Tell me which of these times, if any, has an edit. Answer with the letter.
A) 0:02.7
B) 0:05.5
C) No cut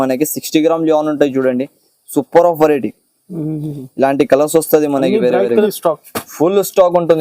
B